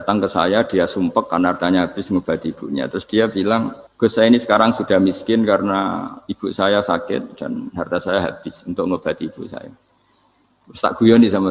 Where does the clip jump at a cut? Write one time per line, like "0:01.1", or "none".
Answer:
0:03.8